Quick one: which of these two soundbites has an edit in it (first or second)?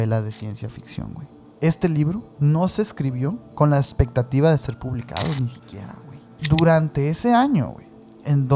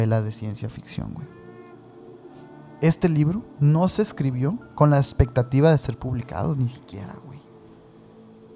first